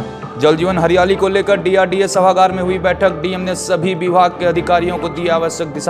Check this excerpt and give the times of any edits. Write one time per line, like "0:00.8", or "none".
none